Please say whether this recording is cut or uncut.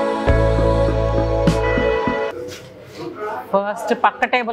cut